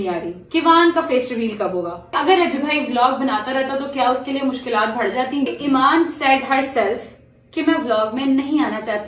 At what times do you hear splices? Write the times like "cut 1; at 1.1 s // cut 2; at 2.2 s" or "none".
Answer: cut 1; at 2.2 s // cut 2; at 5.5 s